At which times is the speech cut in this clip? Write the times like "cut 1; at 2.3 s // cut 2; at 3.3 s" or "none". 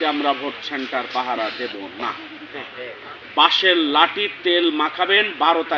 none